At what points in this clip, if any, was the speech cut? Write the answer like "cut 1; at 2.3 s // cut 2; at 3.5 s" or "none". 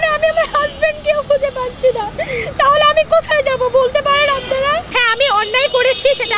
cut 1; at 5.0 s